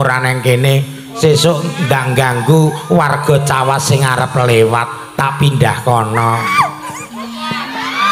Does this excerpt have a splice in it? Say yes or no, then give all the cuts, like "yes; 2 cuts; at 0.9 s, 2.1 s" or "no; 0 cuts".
no; 0 cuts